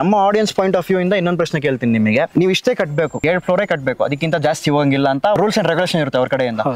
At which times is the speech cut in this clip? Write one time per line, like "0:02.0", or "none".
0:02.3
0:03.2
0:05.4